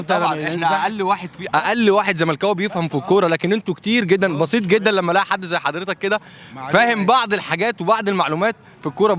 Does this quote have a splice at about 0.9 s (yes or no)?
no